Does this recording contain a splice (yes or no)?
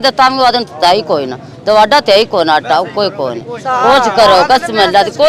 no